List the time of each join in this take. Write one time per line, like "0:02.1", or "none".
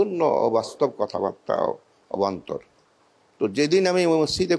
none